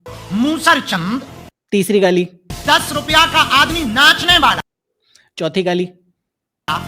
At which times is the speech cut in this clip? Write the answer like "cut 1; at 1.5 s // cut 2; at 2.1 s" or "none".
cut 1; at 2.4 s